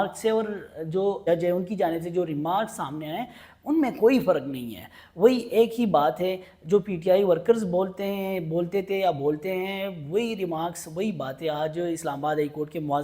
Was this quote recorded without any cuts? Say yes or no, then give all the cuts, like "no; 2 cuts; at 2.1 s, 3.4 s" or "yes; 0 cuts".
no; 1 cut; at 1.3 s